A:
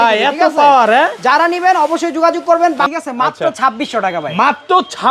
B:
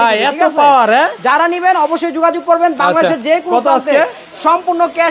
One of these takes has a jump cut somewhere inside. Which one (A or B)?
A